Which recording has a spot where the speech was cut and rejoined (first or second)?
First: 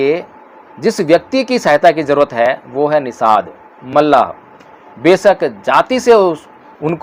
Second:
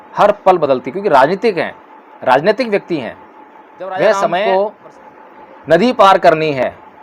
second